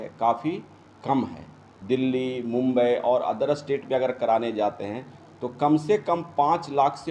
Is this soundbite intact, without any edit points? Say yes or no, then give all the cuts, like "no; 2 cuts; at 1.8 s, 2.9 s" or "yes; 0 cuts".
no; 1 cut; at 1.9 s